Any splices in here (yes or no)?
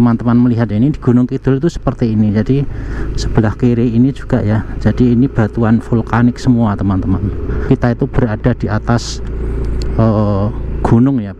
yes